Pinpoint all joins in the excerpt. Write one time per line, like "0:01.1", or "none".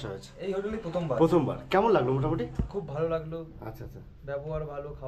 none